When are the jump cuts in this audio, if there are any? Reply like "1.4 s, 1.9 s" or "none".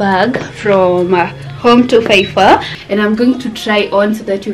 2.7 s